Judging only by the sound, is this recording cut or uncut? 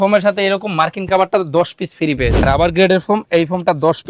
cut